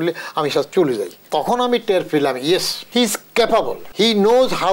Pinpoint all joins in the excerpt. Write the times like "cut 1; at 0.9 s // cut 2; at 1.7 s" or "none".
cut 1; at 1.2 s // cut 2; at 2.8 s // cut 3; at 3.8 s